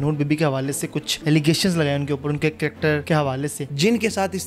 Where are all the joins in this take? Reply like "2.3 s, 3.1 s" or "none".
1.1 s, 3.3 s